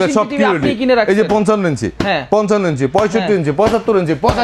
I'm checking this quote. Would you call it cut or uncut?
uncut